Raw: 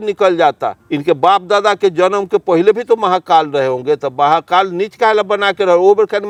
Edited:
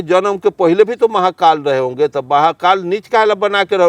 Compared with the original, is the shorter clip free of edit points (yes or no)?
yes